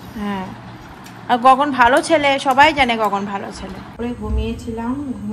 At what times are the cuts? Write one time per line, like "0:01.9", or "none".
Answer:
0:03.9